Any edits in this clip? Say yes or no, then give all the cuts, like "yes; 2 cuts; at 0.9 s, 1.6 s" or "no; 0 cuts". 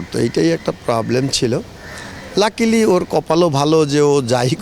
no; 0 cuts